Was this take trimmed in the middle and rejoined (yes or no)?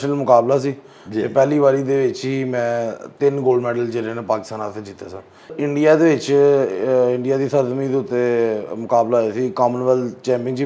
yes